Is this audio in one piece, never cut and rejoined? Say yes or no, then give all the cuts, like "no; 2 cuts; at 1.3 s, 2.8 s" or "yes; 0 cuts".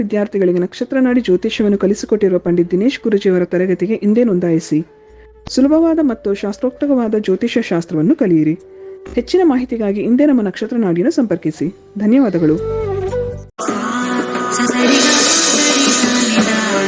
no; 1 cut; at 13.5 s